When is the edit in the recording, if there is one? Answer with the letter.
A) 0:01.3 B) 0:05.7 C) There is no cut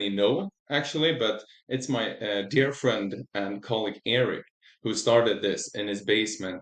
C